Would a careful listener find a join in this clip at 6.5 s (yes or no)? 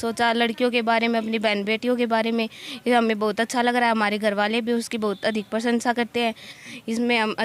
yes